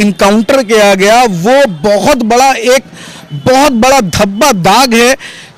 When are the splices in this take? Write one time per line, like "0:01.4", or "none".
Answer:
none